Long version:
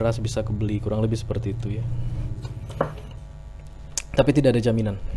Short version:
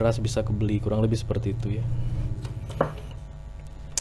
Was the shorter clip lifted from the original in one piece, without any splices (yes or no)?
yes